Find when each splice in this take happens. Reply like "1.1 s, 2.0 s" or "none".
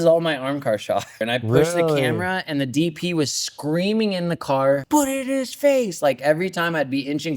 1.3 s, 4.8 s